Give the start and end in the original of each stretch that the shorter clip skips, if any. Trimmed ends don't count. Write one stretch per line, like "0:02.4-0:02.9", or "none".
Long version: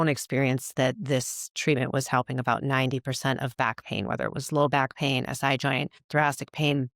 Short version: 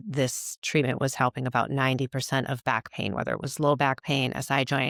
none

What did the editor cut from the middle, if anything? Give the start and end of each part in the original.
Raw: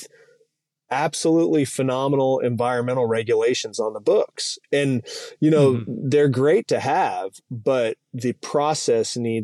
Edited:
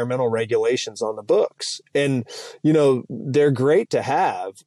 none

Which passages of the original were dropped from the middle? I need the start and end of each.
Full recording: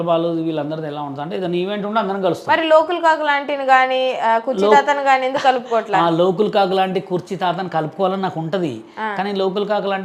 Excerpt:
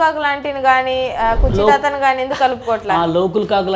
none

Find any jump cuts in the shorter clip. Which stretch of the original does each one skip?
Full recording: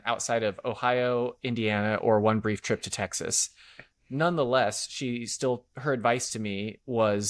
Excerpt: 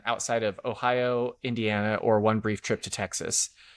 none

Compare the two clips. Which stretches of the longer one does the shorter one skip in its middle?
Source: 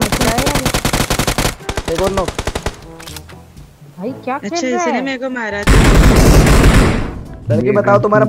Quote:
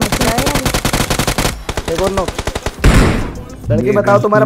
0:02.8-0:06.6

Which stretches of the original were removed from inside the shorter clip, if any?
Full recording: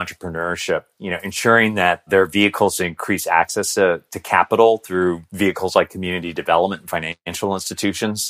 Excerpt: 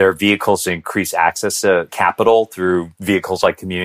0:04.0-0:04.2

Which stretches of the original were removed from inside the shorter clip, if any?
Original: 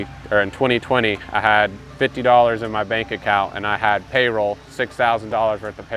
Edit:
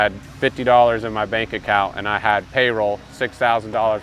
none

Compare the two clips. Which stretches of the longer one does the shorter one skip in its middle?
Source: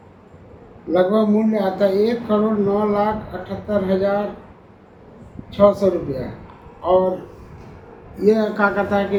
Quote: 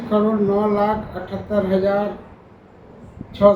none

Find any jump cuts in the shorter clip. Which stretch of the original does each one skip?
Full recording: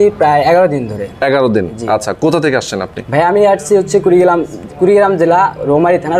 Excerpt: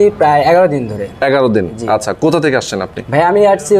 none

